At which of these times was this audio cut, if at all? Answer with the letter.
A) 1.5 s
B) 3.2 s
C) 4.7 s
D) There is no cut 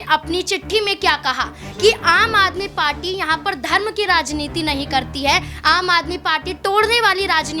D